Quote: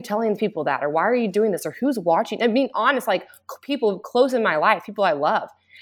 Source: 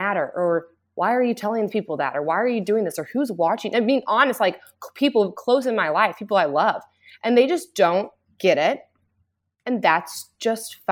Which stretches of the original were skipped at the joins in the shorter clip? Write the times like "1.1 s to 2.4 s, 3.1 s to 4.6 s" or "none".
none